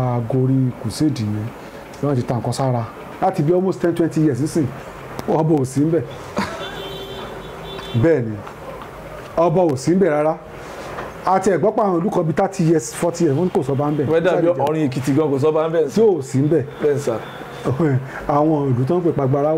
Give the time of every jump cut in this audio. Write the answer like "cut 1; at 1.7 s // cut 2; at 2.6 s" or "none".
cut 1; at 3.0 s